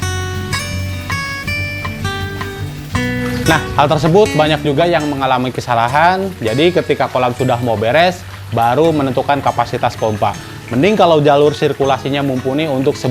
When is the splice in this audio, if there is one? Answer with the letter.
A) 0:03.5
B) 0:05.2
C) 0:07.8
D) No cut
A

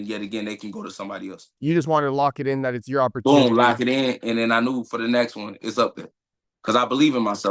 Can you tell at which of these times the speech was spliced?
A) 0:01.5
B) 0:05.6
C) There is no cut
A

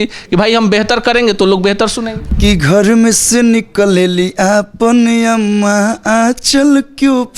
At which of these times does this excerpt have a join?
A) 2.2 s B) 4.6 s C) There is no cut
A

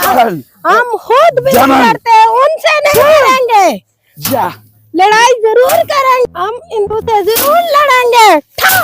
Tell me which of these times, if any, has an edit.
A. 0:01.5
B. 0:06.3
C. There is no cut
B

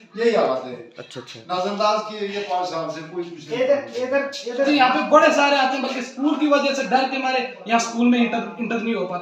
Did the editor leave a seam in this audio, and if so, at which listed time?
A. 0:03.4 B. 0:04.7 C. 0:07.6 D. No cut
B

